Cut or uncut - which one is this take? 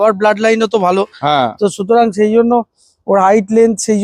uncut